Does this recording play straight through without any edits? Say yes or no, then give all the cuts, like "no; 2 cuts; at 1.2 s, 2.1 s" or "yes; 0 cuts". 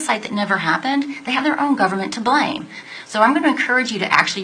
no; 1 cut; at 2.7 s